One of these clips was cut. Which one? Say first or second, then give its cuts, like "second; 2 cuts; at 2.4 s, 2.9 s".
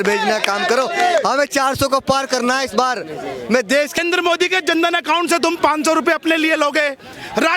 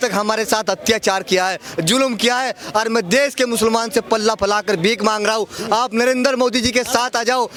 first; 1 cut; at 4.0 s